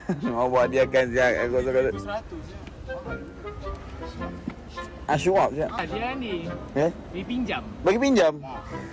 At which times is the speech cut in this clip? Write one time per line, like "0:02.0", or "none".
0:05.8